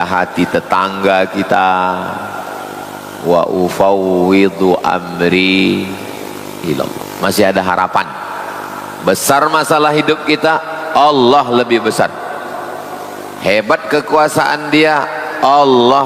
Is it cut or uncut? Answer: cut